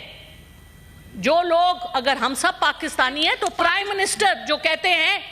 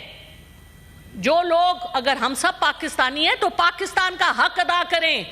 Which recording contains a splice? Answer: first; 1 cut; at 3.6 s

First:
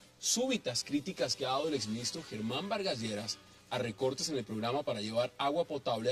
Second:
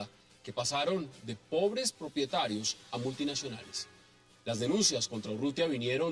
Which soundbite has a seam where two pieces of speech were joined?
first; 1 cut; at 4.0 s

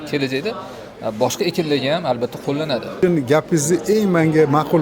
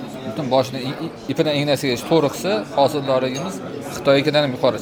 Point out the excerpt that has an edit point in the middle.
first; 1 cut; at 3.0 s

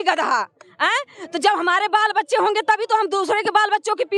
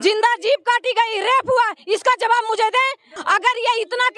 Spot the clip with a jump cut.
second; 1 cut; at 3.1 s

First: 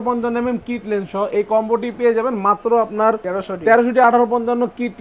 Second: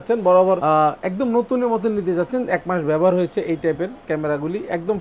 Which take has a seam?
first; 1 cut; at 3.2 s

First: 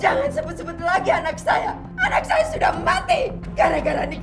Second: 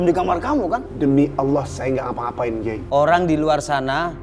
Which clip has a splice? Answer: second; 2 cuts; at 0.9 s, 2.8 s

